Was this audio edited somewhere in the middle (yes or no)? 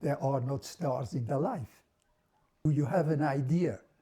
yes